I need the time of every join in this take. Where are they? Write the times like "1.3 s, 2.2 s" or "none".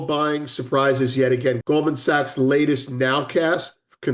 1.6 s